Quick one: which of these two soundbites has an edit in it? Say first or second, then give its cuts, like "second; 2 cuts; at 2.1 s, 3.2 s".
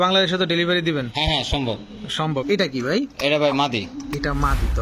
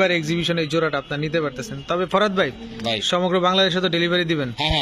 first; 1 cut; at 2.4 s